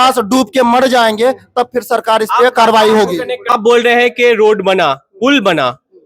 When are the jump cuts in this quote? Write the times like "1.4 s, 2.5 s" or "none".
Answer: 3.6 s